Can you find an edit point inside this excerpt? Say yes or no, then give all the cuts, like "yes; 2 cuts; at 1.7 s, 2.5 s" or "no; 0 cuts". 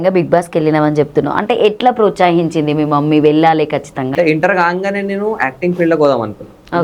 yes; 1 cut; at 4.1 s